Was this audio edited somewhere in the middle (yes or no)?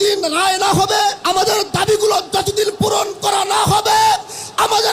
yes